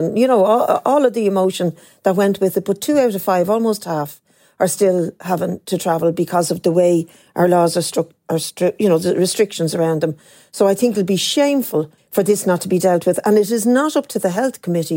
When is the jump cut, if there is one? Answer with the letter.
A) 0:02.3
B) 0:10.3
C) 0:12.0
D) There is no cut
C